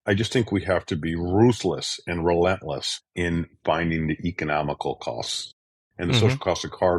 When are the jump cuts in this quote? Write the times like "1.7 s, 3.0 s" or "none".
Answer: 5.8 s